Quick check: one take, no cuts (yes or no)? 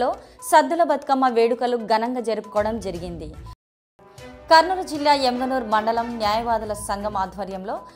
no